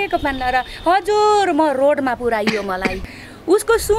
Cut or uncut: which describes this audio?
cut